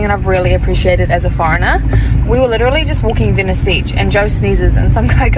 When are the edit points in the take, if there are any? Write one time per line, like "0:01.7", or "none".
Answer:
none